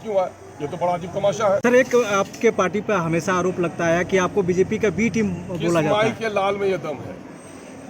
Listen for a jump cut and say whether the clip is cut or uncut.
cut